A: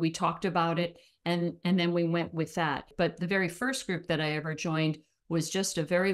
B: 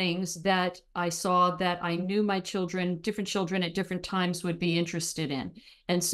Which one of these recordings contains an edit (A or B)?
A